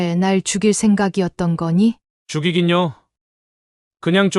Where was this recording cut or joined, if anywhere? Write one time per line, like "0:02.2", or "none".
0:02.1